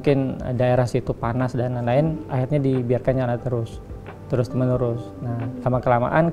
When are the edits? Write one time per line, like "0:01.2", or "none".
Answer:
none